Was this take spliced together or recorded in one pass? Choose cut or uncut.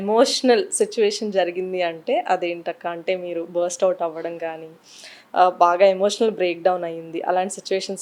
uncut